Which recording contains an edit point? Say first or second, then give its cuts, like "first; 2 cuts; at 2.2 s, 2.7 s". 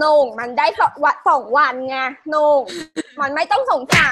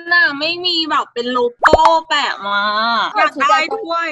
second; 1 cut; at 3.1 s